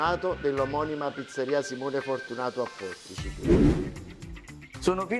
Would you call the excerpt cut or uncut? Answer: cut